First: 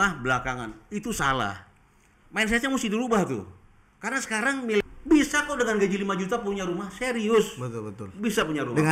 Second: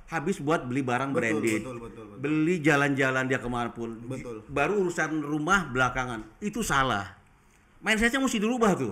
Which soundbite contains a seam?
first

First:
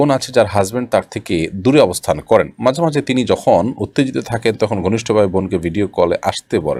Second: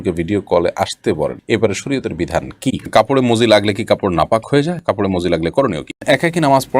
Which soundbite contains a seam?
second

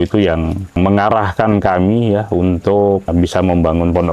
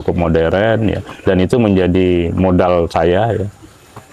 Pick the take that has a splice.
first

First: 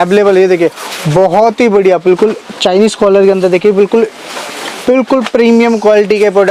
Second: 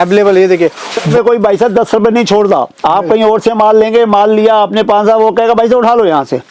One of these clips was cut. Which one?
second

